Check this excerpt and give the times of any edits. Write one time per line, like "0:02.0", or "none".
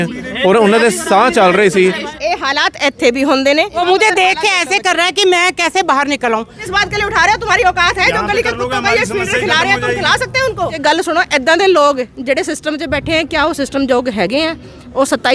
0:02.1
0:03.7
0:06.6
0:10.8